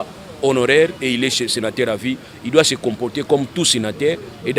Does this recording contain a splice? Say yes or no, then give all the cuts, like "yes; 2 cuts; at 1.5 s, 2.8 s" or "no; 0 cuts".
no; 0 cuts